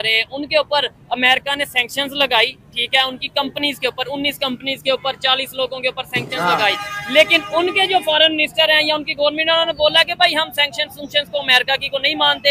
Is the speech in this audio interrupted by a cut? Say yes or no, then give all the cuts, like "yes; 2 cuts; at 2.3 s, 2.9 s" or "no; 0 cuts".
no; 0 cuts